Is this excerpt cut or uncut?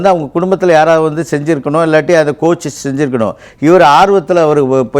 uncut